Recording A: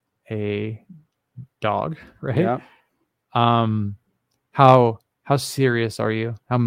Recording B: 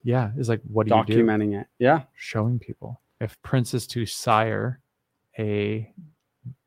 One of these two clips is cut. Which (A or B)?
B